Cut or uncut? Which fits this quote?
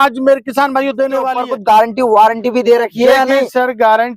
cut